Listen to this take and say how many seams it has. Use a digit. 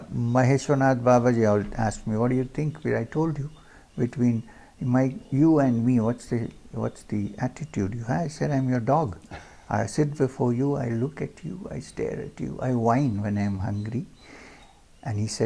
0